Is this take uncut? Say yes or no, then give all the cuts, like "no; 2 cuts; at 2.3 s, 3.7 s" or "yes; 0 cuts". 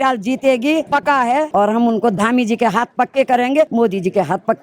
no; 2 cuts; at 1.2 s, 3.7 s